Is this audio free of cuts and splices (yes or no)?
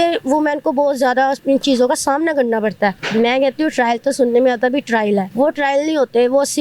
no